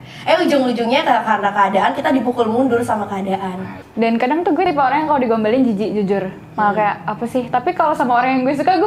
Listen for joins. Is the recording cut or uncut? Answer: cut